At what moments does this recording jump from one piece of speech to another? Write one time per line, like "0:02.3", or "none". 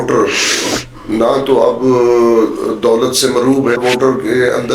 0:03.8